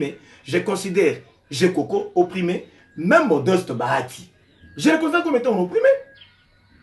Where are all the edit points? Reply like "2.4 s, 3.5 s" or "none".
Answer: none

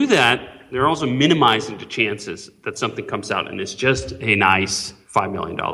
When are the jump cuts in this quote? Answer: none

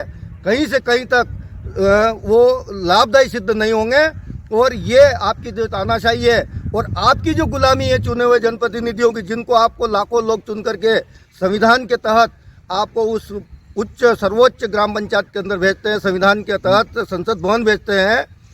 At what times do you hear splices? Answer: none

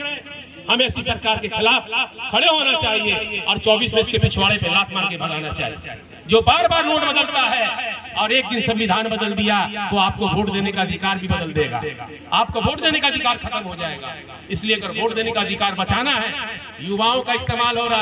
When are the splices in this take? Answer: none

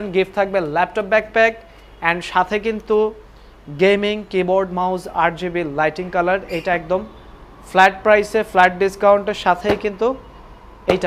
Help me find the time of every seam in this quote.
none

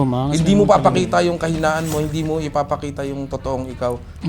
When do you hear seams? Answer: none

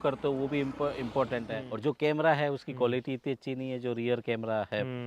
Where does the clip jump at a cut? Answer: 1.6 s

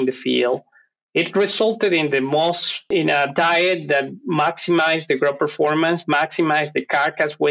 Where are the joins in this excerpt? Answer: 2.8 s

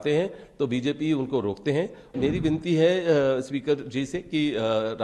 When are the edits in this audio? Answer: 2.1 s

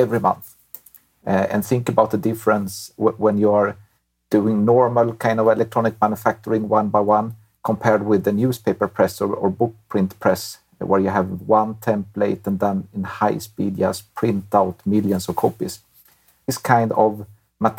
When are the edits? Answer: 16.5 s

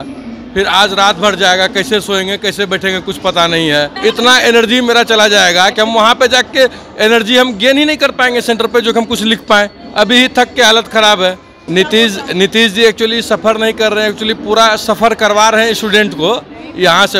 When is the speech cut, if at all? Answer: 3.9 s, 11.6 s

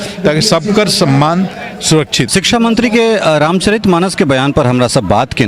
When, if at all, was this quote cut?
2.3 s

